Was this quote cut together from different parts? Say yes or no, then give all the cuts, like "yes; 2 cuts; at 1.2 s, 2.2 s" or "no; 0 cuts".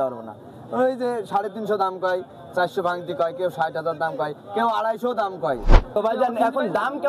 yes; 1 cut; at 5.9 s